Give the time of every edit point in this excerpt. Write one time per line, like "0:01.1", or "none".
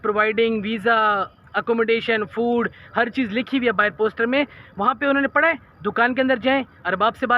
none